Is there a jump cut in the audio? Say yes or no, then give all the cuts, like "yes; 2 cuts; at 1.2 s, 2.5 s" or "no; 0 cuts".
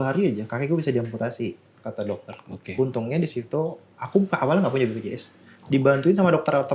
no; 0 cuts